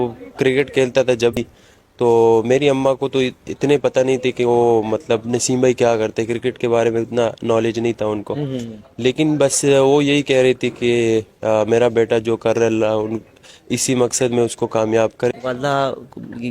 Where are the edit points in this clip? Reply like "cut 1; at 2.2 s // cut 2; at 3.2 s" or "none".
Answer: cut 1; at 1.4 s // cut 2; at 15.3 s